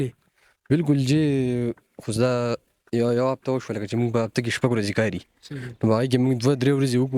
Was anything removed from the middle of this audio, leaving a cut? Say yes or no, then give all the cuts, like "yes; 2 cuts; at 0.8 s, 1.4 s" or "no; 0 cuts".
no; 0 cuts